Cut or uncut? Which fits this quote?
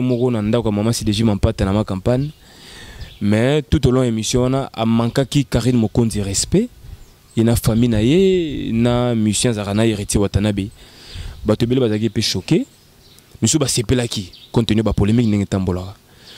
uncut